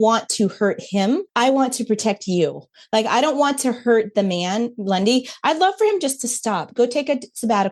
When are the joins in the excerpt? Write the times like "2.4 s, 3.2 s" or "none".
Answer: 1.3 s